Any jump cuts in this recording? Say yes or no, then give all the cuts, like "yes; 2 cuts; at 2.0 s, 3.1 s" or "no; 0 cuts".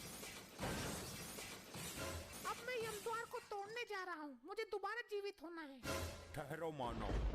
yes; 1 cut; at 2.3 s